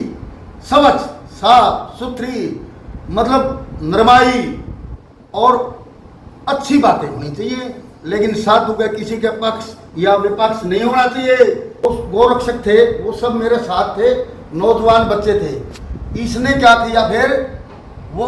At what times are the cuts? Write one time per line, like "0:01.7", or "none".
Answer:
0:11.8